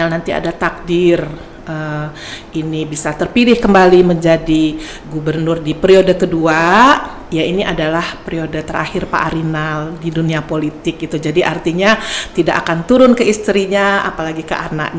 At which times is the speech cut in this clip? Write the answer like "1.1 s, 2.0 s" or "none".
none